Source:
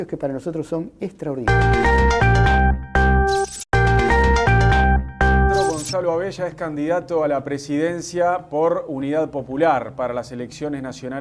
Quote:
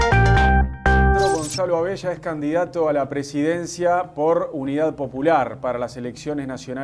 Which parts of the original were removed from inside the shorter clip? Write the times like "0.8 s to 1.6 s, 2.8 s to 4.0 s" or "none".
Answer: 3.4 s to 5.6 s